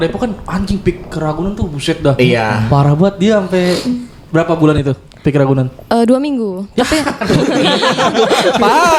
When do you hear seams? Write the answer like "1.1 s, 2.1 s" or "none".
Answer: none